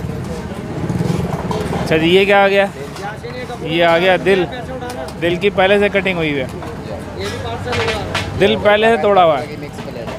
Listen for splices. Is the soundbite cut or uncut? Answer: uncut